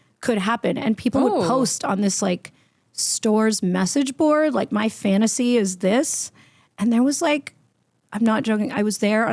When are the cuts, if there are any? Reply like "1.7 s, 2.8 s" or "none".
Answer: none